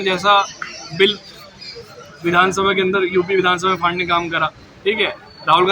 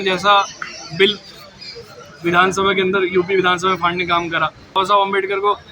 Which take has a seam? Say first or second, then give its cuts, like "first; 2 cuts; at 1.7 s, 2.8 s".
second; 1 cut; at 4.8 s